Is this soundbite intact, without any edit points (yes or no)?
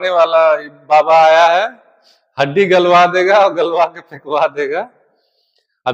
yes